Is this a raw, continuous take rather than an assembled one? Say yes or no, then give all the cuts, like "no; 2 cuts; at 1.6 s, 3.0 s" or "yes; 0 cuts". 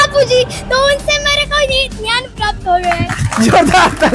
yes; 0 cuts